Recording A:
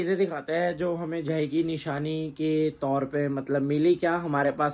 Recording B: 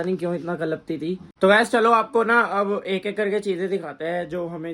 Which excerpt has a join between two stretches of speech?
B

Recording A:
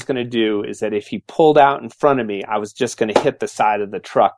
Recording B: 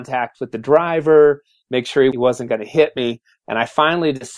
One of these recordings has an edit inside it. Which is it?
B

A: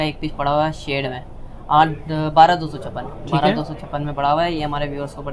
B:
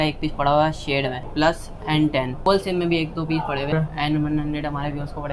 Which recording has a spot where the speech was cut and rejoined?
B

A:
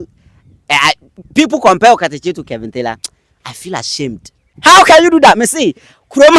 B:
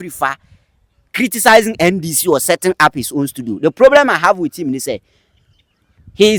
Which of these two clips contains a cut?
A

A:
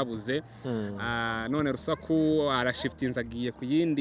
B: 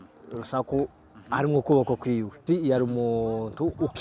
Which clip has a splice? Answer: B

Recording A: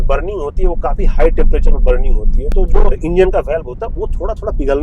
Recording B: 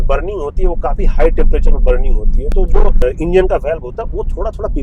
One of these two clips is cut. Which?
A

